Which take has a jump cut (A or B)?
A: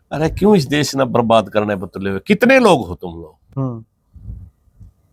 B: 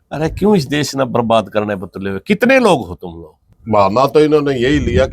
B